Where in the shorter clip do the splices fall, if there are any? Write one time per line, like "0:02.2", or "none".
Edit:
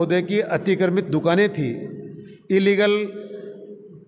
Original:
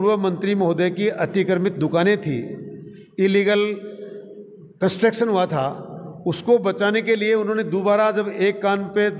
none